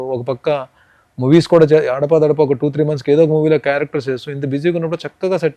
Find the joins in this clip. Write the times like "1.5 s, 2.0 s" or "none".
none

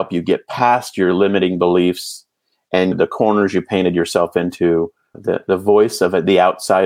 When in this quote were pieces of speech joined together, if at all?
2.9 s, 5.2 s

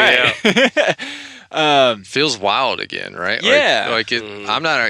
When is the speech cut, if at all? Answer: none

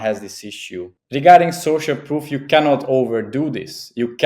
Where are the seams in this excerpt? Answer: 1.0 s

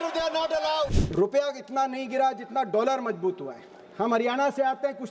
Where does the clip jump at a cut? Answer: 1.0 s

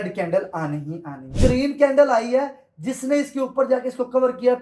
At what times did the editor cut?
1.4 s

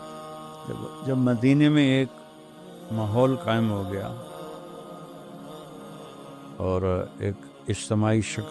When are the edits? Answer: 4.1 s, 6.5 s

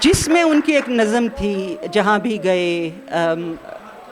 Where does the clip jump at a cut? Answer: none

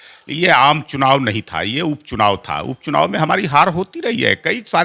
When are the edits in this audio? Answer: none

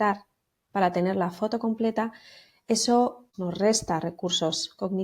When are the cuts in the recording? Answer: 3.3 s

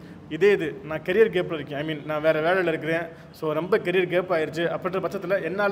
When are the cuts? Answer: none

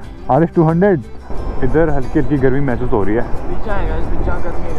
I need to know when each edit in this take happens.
1.1 s

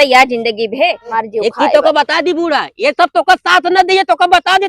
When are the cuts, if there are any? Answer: 1.1 s

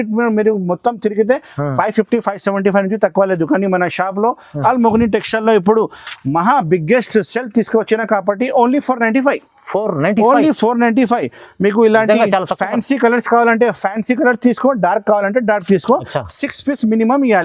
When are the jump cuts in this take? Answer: none

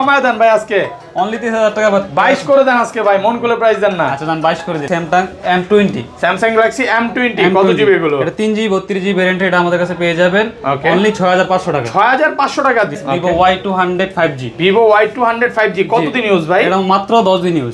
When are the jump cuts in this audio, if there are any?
4.9 s, 13.0 s

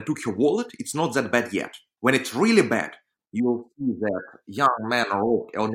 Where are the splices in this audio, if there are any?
1.8 s

